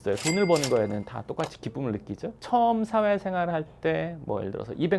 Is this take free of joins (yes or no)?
no